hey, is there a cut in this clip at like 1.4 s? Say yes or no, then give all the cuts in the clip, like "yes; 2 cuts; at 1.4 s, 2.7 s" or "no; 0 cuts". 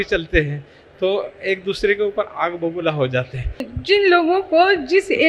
no; 1 cut; at 3.7 s